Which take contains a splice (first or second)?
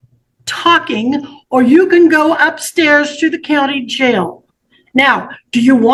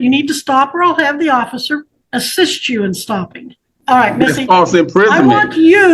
second